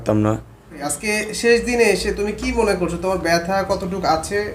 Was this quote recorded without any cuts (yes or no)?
no